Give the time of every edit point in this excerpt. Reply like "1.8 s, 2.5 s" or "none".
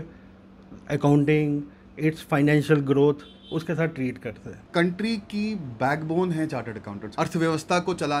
4.5 s, 7.0 s